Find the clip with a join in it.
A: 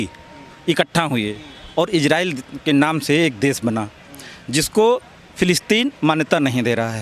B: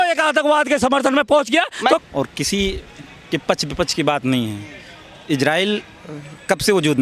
B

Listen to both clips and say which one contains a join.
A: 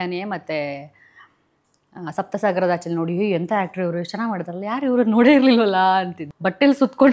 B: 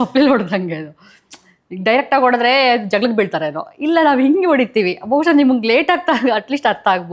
A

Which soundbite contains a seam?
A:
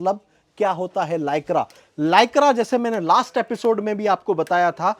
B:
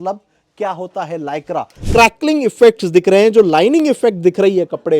B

